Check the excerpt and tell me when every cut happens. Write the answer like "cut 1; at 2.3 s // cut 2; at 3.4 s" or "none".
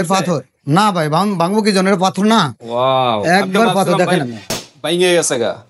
none